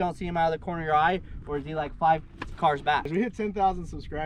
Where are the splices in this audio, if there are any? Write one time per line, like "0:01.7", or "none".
0:03.1